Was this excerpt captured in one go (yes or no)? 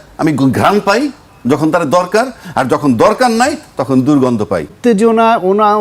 no